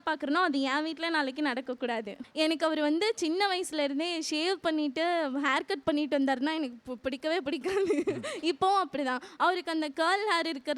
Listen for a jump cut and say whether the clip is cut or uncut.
cut